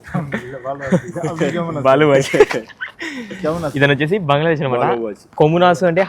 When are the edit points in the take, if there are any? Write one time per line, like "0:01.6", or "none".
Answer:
none